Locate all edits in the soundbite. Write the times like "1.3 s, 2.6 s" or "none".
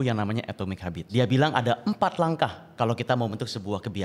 0.9 s